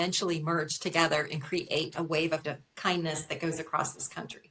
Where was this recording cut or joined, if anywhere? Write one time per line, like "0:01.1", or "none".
0:02.4